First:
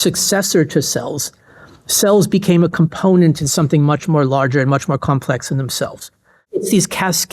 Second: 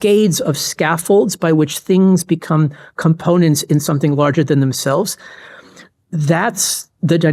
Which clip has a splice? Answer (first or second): first